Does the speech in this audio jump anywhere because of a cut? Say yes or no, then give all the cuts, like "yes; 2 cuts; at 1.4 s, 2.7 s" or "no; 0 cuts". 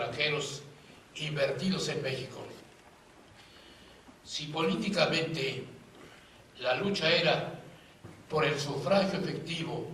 yes; 1 cut; at 1.4 s